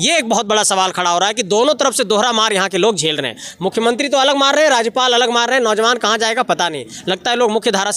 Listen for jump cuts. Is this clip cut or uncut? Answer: uncut